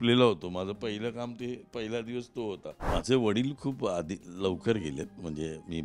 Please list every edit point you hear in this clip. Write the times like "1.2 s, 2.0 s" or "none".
2.8 s